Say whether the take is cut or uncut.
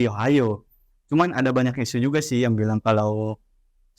uncut